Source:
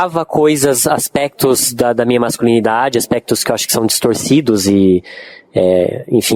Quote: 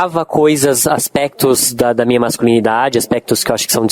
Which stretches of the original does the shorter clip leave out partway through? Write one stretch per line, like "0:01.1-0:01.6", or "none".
none